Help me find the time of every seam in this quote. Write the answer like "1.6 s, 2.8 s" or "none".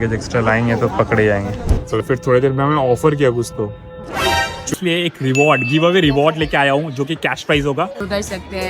2.0 s, 4.7 s, 8.0 s